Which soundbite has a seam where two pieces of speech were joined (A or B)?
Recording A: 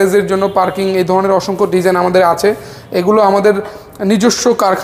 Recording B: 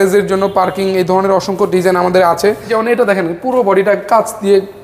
B